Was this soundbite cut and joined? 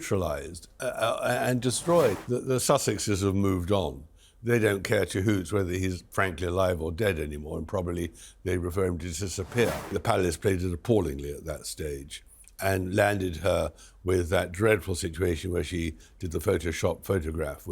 yes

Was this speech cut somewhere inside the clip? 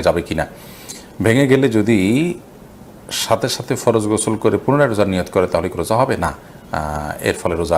no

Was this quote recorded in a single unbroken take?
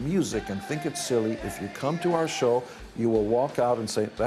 yes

